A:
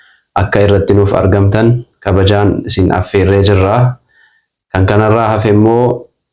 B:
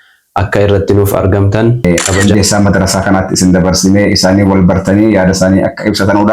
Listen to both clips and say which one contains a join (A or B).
B